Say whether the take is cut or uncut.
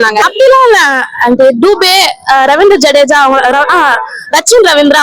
uncut